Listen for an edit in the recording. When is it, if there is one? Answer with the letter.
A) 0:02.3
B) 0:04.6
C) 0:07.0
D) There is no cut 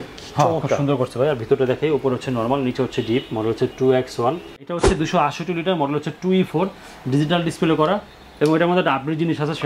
B